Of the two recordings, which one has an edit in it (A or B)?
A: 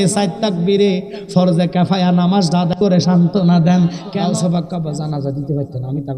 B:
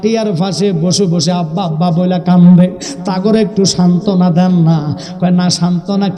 A